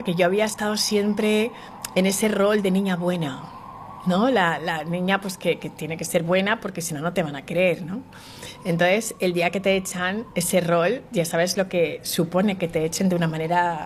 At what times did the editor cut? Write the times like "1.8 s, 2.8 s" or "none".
none